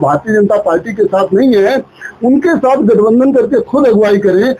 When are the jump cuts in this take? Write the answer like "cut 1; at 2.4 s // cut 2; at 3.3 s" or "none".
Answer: none